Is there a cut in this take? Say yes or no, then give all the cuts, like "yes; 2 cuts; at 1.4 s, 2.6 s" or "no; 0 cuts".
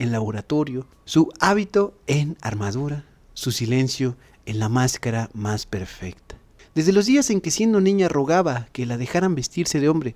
no; 0 cuts